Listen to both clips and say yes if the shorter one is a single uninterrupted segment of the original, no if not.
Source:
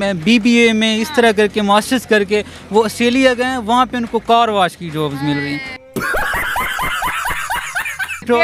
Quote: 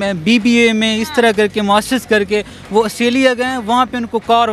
yes